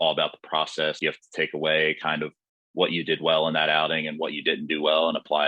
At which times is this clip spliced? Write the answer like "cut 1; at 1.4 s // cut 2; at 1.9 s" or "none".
cut 1; at 1.0 s